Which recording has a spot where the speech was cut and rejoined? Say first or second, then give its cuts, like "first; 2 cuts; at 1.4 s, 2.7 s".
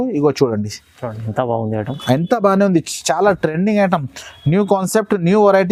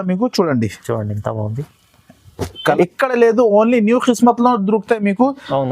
second; 1 cut; at 2.5 s